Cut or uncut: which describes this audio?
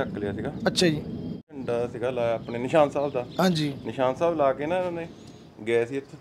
cut